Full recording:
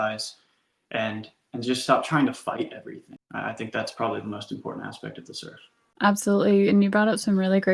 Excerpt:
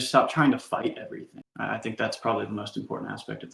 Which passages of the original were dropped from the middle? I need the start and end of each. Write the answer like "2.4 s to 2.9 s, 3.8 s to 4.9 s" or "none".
none